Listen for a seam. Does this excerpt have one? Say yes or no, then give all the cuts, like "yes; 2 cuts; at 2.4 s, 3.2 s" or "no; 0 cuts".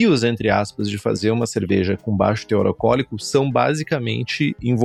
no; 0 cuts